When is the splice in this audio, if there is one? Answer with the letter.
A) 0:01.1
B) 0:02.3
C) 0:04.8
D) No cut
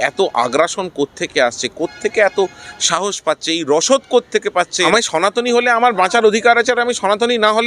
C